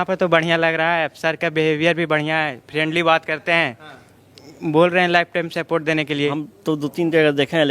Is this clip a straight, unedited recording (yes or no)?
no